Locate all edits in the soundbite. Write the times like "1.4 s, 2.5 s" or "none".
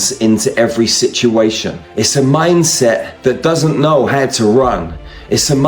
3.1 s

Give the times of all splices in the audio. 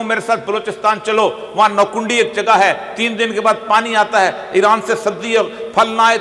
none

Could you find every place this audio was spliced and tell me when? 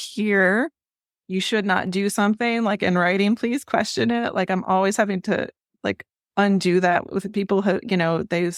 none

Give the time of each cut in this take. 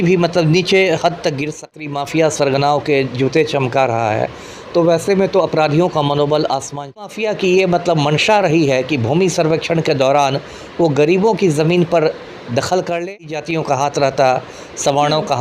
1.8 s, 7.1 s, 13.4 s

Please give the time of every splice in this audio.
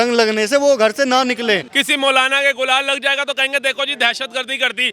1.7 s

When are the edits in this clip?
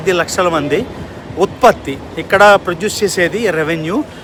none

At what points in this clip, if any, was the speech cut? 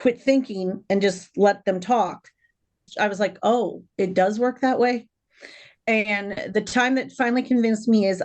2.9 s

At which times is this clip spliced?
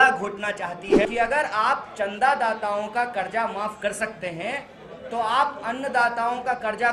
1.0 s

